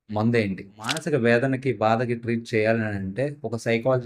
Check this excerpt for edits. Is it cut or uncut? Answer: cut